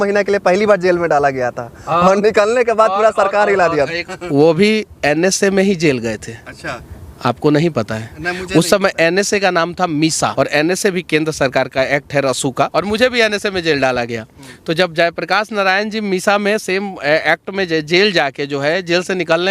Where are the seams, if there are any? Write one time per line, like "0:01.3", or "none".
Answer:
0:04.0
0:10.3
0:12.7